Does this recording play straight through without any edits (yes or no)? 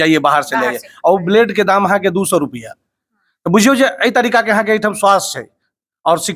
yes